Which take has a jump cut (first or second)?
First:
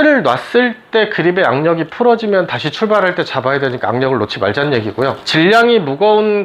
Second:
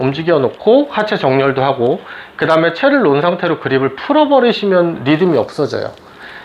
first